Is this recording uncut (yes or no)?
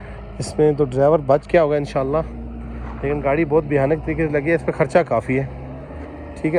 yes